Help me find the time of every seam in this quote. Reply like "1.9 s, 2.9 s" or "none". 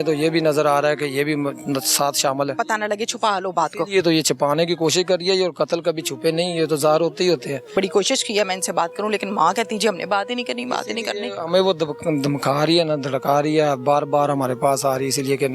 2.6 s, 7.7 s